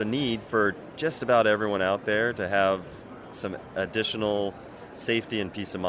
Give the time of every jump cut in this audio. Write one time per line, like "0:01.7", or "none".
none